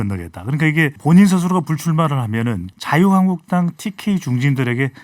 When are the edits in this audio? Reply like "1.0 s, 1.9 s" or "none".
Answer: 1.0 s, 2.7 s